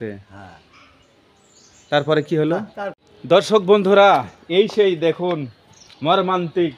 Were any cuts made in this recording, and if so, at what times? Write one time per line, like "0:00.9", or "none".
0:02.8